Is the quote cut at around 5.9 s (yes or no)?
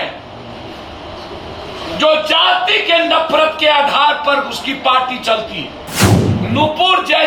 yes